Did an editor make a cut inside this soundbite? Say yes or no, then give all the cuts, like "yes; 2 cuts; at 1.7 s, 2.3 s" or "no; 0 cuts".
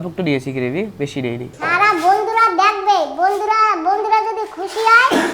yes; 1 cut; at 1.5 s